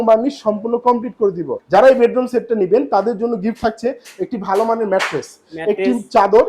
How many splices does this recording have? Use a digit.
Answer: 1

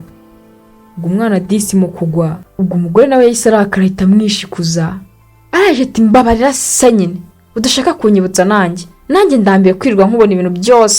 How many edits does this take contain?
1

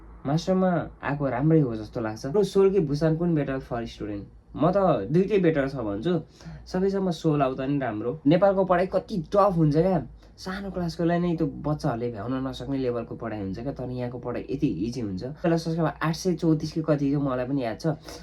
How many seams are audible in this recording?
3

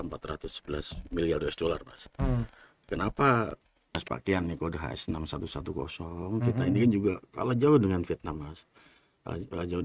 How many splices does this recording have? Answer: 1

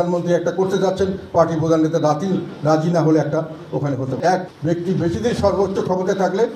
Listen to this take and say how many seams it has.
1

